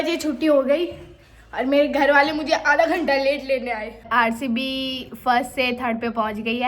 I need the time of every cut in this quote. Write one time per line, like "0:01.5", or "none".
0:04.0